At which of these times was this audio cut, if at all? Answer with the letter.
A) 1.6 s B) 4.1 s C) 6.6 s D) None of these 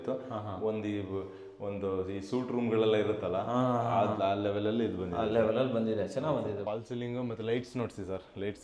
C